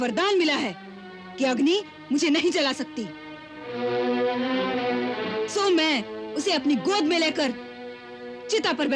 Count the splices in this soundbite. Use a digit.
0